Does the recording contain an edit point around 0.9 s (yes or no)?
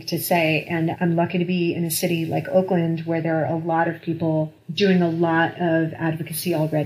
yes